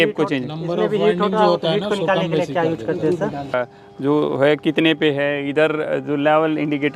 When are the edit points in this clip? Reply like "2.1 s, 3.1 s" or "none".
3.5 s